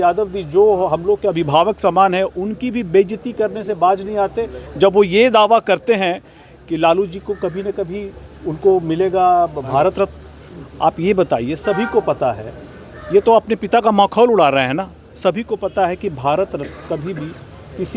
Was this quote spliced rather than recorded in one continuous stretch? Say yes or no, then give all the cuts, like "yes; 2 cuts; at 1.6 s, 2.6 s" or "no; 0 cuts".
no; 0 cuts